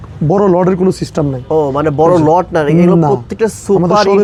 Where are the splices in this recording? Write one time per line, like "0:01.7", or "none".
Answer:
none